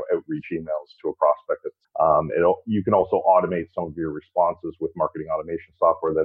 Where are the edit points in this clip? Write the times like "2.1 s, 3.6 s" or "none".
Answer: 1.8 s